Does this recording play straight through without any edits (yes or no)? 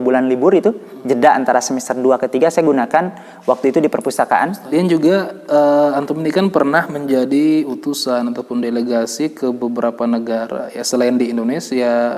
no